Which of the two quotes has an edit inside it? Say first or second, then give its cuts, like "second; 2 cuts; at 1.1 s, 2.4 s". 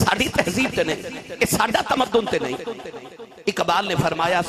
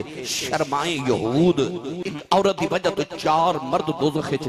second; 1 cut; at 2.1 s